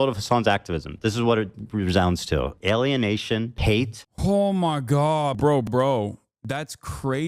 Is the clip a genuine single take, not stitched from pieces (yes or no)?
no